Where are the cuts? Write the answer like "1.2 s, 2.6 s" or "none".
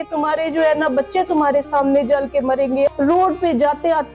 2.9 s